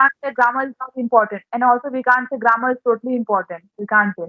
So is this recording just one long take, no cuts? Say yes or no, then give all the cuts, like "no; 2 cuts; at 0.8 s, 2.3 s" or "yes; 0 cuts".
yes; 0 cuts